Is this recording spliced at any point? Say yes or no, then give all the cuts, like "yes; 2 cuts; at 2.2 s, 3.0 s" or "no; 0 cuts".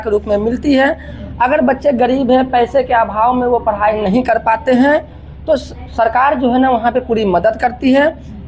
no; 0 cuts